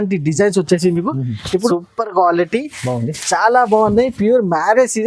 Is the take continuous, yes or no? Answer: no